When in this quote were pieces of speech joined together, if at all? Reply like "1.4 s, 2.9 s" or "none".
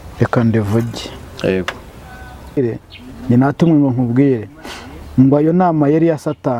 2.6 s

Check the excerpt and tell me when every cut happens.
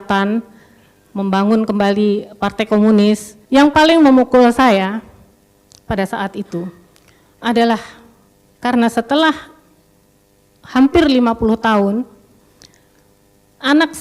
3.3 s

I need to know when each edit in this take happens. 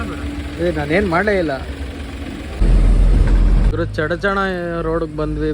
2.6 s

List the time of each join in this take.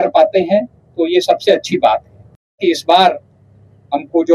2.6 s

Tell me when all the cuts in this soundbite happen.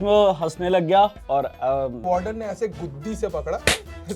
2.0 s

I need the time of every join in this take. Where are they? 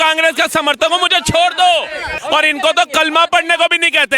2.2 s

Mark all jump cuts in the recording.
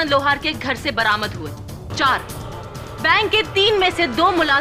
1.9 s

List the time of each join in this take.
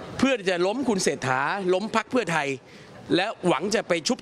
none

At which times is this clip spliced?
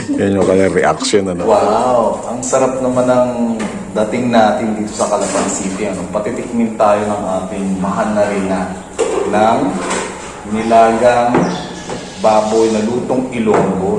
1.4 s

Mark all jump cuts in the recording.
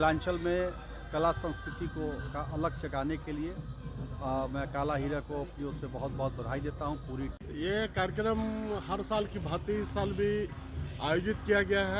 7.3 s

